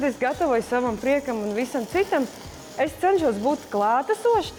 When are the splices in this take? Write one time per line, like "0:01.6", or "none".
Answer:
none